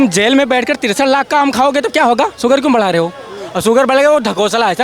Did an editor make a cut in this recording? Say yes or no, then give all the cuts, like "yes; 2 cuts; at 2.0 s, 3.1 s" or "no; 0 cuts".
no; 0 cuts